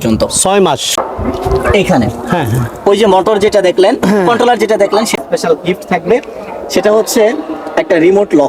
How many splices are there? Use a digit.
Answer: 2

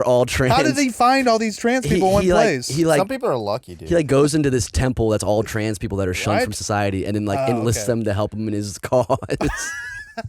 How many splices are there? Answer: 0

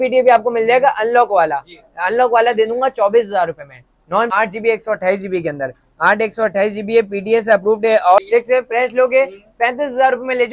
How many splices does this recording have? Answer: 2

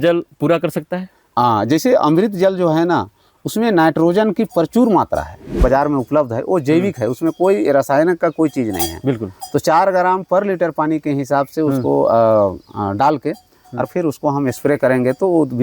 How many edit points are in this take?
1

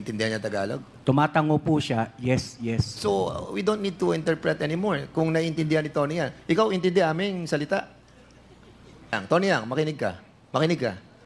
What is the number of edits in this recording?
1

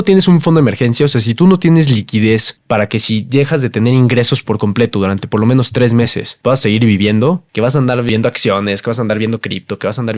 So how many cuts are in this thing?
0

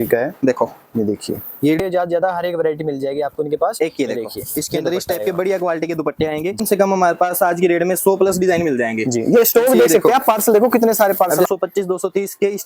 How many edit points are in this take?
3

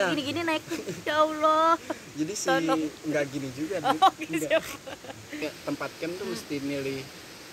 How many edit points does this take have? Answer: 1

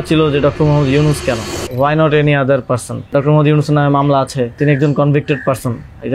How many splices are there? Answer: 3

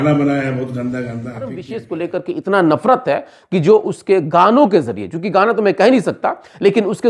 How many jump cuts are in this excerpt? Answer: 1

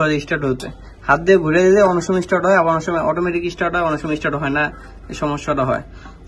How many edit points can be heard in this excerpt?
0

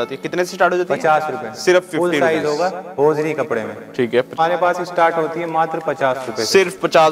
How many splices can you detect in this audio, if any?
1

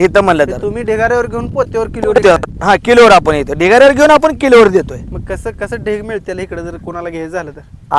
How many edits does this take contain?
0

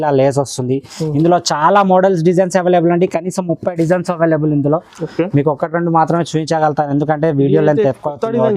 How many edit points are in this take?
0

